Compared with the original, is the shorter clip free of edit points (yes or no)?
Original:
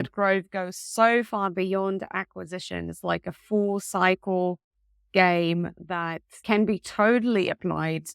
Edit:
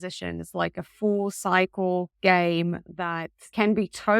no